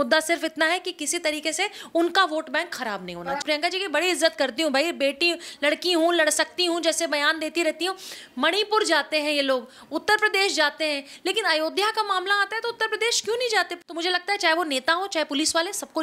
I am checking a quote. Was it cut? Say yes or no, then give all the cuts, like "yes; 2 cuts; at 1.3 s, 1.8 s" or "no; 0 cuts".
yes; 2 cuts; at 3.4 s, 13.7 s